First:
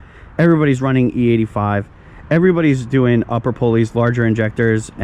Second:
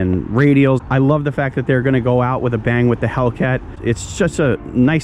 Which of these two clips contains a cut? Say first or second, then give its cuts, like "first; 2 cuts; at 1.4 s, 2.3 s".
second; 2 cuts; at 0.8 s, 3.7 s